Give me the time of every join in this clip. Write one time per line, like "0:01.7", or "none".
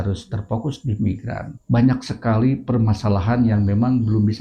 none

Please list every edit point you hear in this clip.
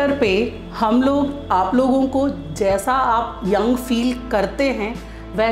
none

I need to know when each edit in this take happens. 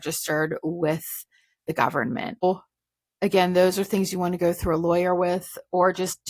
0:02.4

